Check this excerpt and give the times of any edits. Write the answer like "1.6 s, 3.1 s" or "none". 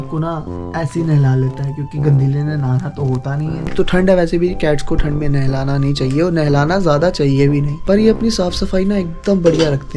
none